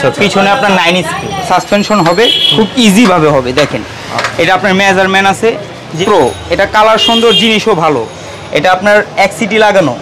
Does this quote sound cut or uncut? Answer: cut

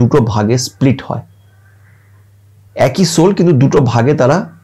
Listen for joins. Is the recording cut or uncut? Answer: uncut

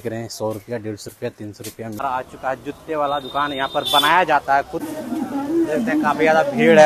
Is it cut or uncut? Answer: cut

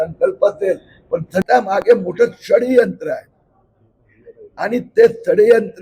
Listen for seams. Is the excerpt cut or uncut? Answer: cut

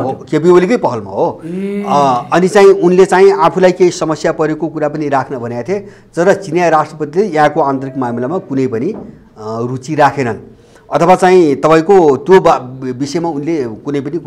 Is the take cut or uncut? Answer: uncut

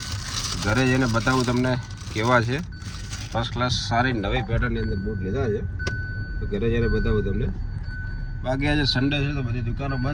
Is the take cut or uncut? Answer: uncut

